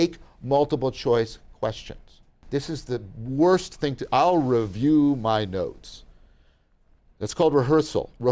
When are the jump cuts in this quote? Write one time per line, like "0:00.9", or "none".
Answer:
0:02.4